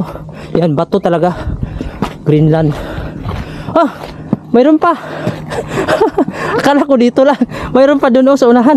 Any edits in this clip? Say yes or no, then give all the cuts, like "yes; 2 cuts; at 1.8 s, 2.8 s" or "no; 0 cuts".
no; 0 cuts